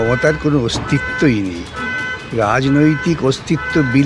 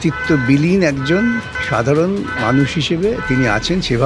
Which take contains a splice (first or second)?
second